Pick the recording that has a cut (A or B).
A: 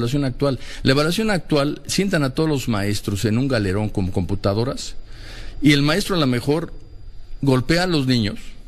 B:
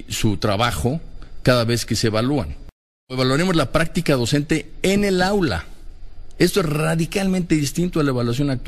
B